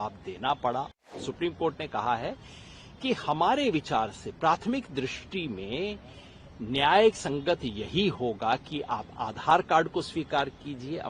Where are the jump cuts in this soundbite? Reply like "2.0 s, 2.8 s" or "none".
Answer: 1.1 s